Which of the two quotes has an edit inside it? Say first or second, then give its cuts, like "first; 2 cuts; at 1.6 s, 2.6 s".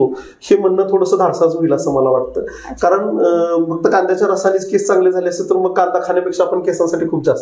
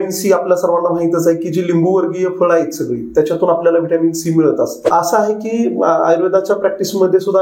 second; 1 cut; at 4.8 s